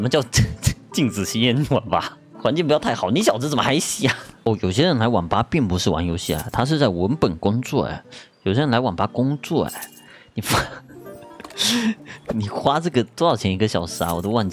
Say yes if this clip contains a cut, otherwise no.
yes